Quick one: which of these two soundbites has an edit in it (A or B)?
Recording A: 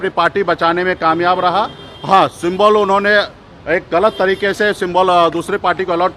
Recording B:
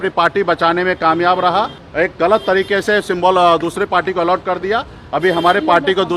B